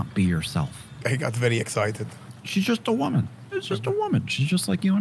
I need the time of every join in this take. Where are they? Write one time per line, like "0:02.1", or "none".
0:00.9